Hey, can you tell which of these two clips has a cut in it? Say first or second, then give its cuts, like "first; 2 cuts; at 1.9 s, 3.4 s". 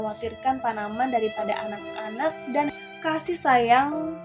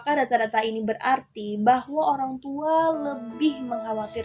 first; 1 cut; at 2.7 s